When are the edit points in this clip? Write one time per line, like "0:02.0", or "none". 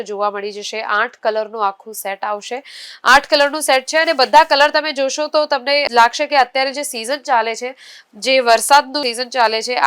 none

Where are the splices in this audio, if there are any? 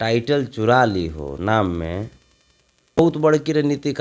0:03.0

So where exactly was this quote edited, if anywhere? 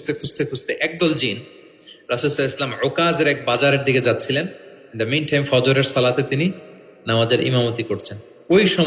none

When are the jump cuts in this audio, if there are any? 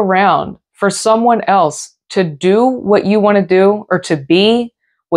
none

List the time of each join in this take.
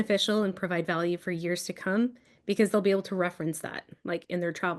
none

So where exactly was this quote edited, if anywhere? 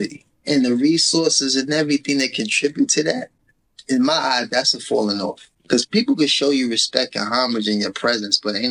0:05.4

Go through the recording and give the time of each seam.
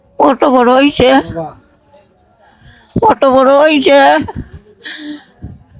none

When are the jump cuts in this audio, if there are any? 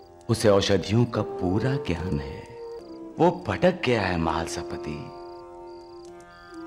0:02.8

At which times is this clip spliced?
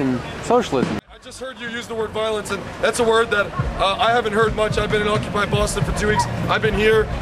0:01.0

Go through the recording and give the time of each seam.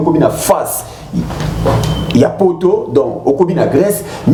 none

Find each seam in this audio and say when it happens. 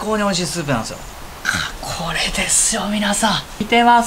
0:01.0

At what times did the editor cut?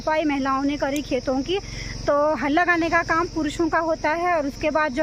none

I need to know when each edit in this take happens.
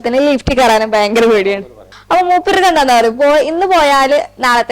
0:01.9

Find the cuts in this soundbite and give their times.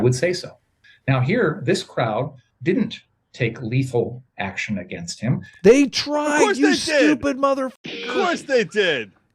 none

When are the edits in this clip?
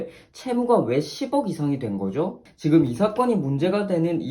0:02.4

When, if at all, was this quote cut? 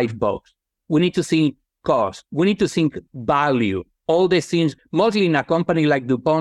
0:04.8

